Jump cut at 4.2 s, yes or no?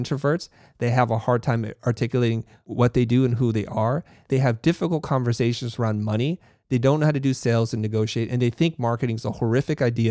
yes